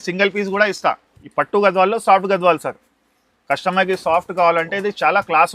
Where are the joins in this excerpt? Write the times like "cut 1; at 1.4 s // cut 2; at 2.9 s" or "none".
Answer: cut 1; at 1.1 s